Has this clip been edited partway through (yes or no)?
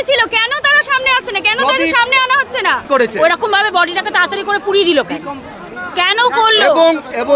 yes